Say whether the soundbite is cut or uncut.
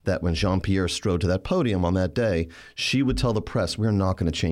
uncut